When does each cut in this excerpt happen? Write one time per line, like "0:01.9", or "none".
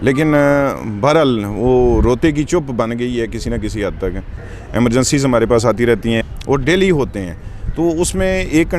0:04.5
0:06.2